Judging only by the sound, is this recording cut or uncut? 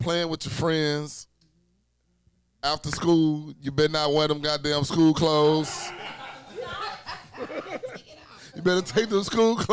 uncut